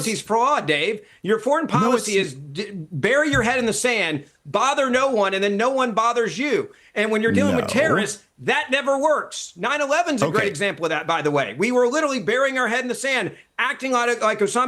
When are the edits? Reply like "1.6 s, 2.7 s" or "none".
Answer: none